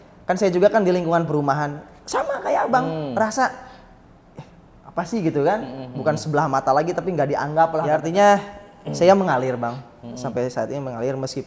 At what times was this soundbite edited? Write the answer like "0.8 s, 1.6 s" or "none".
7.8 s